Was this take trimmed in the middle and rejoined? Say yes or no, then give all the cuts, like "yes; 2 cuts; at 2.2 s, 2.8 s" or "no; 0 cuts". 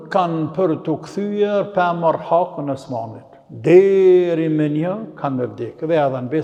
no; 0 cuts